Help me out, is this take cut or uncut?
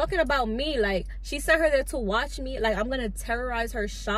uncut